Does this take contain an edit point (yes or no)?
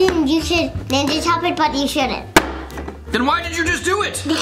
no